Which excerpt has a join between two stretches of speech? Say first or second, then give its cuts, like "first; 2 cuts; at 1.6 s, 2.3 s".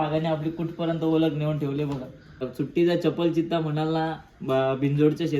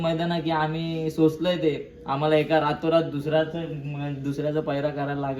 first; 1 cut; at 2.5 s